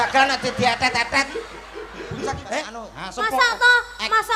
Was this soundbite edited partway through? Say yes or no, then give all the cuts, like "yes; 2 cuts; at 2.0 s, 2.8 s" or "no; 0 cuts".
yes; 1 cut; at 2.7 s